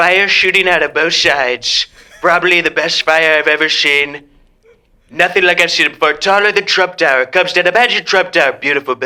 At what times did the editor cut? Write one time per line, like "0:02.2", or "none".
none